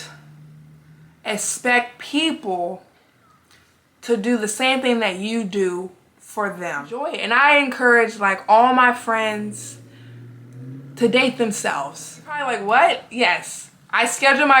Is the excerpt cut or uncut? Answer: cut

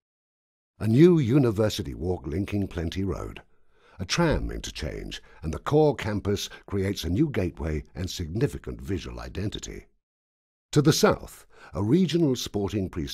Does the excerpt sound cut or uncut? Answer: uncut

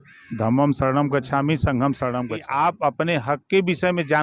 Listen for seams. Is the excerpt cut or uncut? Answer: cut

